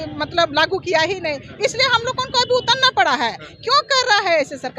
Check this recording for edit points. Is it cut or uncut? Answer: uncut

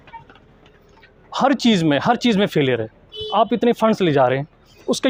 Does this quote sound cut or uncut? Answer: uncut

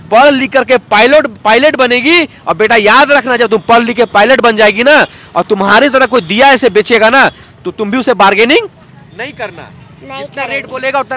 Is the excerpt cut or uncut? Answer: uncut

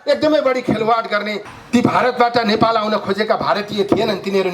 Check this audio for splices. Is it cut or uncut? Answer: cut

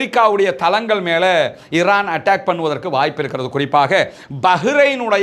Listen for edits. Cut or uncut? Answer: uncut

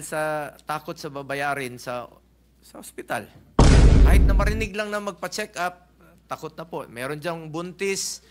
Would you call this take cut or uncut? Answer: uncut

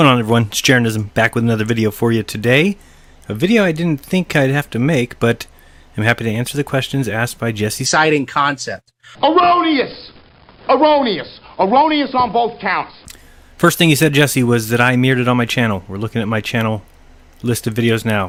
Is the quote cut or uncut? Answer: uncut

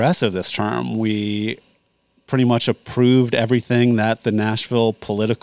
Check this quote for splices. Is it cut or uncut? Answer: uncut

